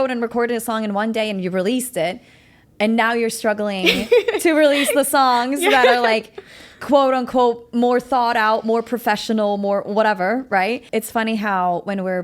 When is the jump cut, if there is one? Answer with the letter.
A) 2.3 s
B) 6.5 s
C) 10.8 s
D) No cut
C